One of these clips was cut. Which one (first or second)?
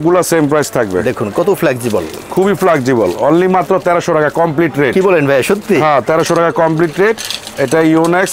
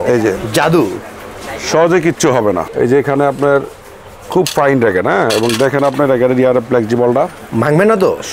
second